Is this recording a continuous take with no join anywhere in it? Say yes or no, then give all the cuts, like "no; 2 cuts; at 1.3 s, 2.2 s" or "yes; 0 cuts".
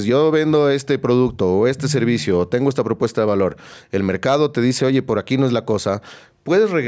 yes; 0 cuts